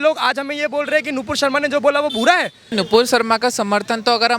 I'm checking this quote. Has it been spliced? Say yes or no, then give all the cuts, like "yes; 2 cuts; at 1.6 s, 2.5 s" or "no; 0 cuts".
yes; 1 cut; at 2.7 s